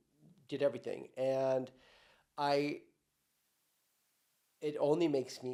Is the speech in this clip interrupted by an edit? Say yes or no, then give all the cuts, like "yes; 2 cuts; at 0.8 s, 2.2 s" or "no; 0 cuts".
no; 0 cuts